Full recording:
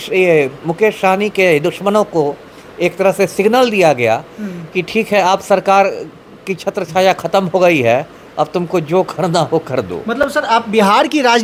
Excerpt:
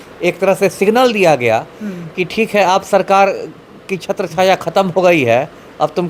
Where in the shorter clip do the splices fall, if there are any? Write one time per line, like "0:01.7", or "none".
none